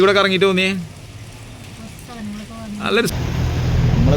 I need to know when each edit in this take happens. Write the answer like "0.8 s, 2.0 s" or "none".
3.1 s